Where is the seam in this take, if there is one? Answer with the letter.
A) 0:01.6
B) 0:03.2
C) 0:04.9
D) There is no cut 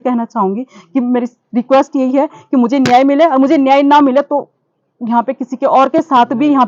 D